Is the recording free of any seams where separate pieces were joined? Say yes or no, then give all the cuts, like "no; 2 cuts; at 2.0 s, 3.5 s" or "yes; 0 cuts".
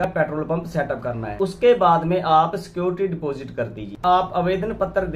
no; 1 cut; at 4.0 s